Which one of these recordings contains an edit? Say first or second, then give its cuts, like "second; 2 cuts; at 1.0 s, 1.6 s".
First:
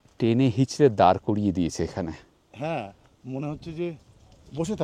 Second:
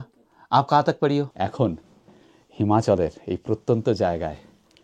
second; 1 cut; at 1.3 s